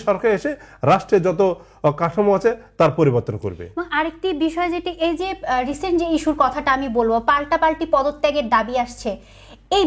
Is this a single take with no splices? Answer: yes; 0 cuts

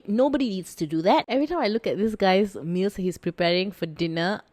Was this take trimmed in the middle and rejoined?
yes; 1 cut; at 1.3 s

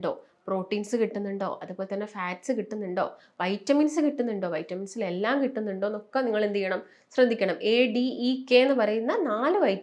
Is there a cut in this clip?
no; 0 cuts

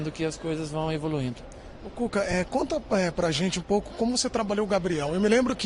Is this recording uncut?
no; 1 cut; at 3.8 s

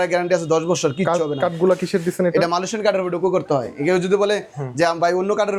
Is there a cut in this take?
no; 0 cuts

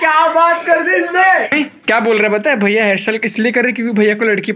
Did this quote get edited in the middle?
yes; 1 cut; at 1.5 s

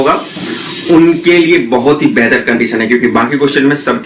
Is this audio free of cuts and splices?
yes; 0 cuts

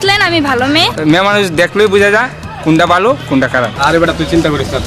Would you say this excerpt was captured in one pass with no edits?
no; 2 cuts; at 0.9 s, 3.7 s

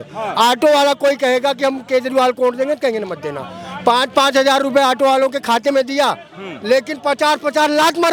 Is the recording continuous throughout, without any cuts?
yes; 0 cuts

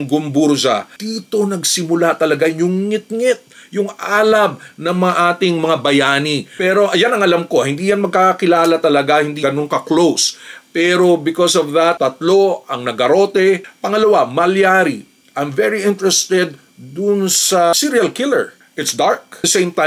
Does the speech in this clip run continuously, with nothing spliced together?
no; 5 cuts; at 0.9 s, 6.5 s, 9.5 s, 13.6 s, 18.6 s

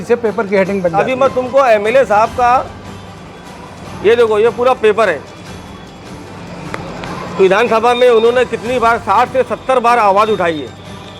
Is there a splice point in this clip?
yes; 1 cut; at 0.9 s

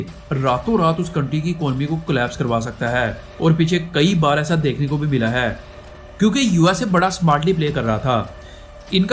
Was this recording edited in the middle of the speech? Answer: yes; 1 cut; at 5.8 s

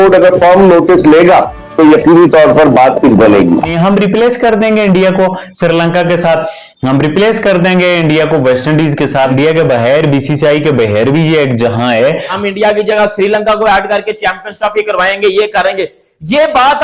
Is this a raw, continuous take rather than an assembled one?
no; 3 cuts; at 3.7 s, 9.3 s, 12.3 s

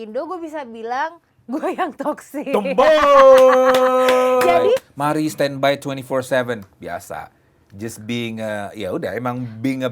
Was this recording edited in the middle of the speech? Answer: yes; 1 cut; at 4.9 s

